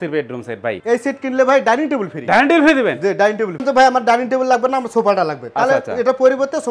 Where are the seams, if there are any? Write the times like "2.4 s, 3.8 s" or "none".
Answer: 0.8 s, 3.6 s